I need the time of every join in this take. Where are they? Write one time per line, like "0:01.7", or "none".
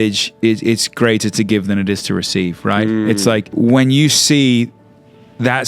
0:03.5

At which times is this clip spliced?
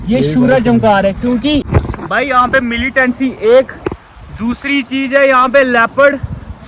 0:01.6

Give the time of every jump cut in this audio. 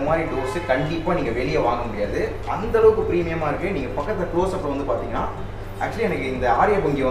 none

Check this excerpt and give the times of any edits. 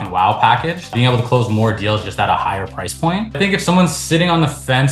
0:00.8
0:03.3

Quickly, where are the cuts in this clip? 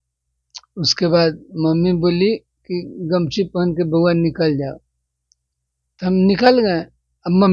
none

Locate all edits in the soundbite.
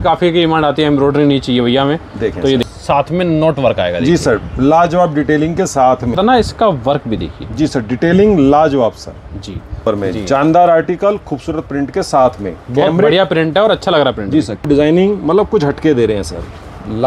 0:02.6
0:06.2
0:09.8
0:14.7

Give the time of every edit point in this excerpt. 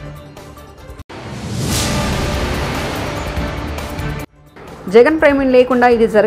0:01.0
0:04.3

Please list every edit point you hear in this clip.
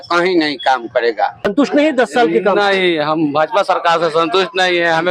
0:01.5

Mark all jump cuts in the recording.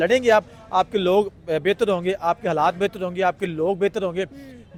none

